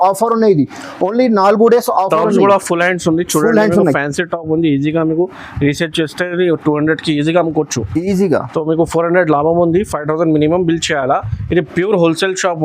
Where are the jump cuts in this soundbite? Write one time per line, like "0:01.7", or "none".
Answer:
none